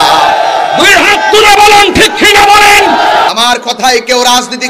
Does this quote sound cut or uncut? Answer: cut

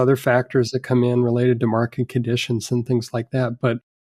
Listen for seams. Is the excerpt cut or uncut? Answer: uncut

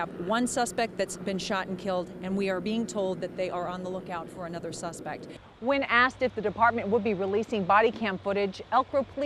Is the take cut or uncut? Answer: cut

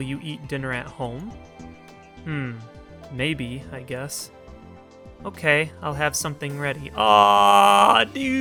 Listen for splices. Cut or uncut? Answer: uncut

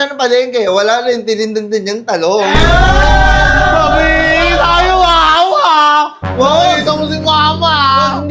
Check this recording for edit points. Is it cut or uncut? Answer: uncut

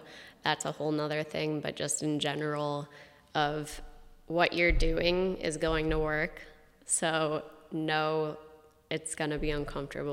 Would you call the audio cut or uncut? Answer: uncut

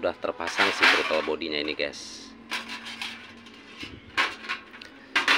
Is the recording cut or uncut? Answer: uncut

